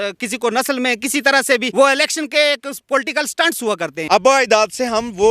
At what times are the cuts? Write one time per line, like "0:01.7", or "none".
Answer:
0:01.7
0:04.0